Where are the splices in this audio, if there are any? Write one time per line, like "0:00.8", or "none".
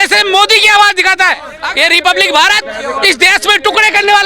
0:01.6